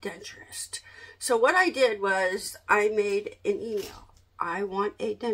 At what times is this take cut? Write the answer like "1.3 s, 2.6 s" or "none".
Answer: none